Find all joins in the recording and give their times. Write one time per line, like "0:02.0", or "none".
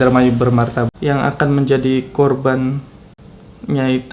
0:00.9